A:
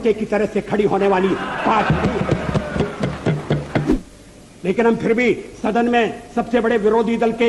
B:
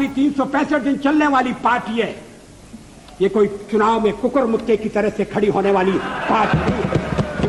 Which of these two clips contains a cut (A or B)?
A